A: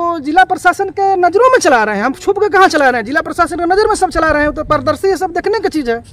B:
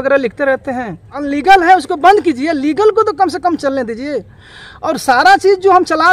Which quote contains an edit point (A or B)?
B